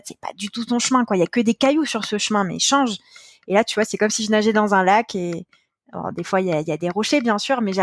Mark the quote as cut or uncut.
uncut